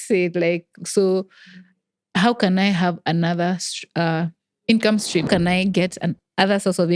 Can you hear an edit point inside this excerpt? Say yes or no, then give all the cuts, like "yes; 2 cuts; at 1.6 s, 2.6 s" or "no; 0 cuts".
yes; 1 cut; at 5.2 s